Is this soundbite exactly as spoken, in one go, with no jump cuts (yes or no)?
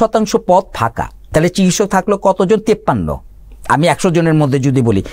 no